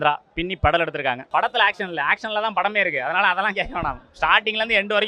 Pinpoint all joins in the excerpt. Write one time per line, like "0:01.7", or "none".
0:01.2